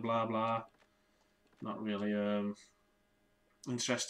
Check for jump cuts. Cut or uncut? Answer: uncut